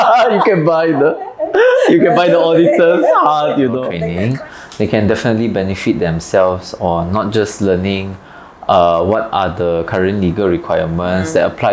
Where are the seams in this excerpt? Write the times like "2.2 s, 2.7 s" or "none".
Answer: 4.0 s